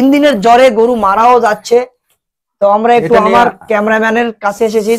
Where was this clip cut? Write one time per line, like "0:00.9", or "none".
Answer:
none